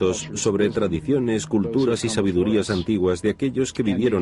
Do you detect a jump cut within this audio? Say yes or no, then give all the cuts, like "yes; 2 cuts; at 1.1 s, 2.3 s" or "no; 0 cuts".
yes; 1 cut; at 1.9 s